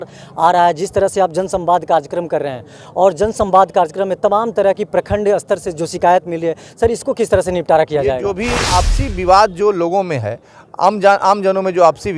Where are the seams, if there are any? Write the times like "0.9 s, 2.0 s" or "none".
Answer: 8.6 s